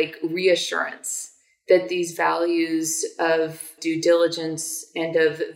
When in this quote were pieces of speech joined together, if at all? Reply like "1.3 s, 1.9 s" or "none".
3.7 s